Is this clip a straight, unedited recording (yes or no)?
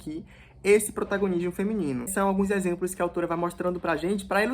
no